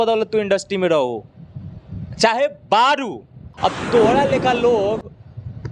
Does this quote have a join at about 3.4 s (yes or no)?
yes